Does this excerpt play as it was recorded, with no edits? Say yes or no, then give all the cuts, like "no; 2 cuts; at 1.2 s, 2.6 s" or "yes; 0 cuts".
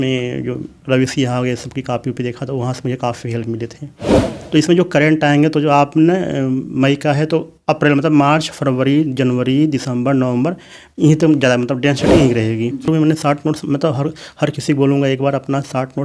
no; 2 cuts; at 4.3 s, 12.9 s